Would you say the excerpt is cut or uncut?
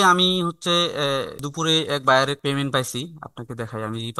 cut